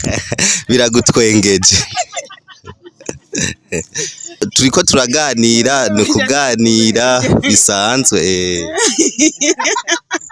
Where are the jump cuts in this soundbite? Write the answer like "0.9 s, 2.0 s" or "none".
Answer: 4.4 s